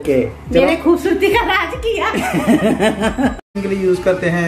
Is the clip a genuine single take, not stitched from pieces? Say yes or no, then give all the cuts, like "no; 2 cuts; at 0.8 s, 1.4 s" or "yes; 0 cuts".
no; 1 cut; at 3.5 s